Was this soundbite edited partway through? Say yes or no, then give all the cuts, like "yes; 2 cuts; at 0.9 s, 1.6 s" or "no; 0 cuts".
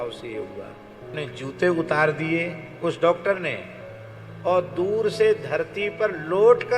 yes; 1 cut; at 1.1 s